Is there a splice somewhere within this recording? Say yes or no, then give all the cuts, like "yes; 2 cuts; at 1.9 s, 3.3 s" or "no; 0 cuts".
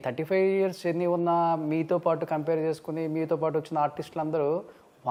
no; 0 cuts